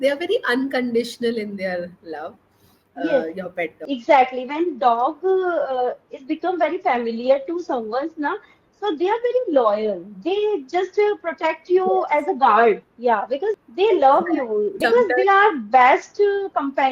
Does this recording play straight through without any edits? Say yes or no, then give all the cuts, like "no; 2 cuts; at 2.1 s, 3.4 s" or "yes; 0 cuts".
no; 2 cuts; at 13.6 s, 14.7 s